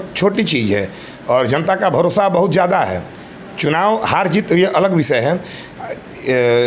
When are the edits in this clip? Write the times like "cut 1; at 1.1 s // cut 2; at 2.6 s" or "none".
none